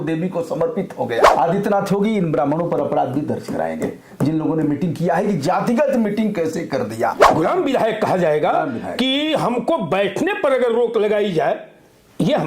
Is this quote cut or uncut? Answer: cut